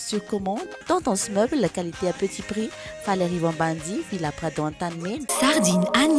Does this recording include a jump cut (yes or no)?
yes